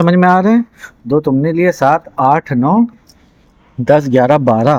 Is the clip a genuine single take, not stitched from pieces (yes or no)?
yes